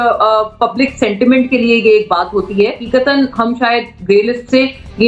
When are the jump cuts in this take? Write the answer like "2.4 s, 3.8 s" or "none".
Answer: 2.8 s